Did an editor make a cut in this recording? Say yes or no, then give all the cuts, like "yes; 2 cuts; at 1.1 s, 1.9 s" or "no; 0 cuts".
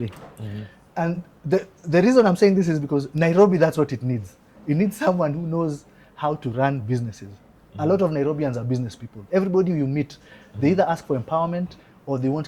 no; 0 cuts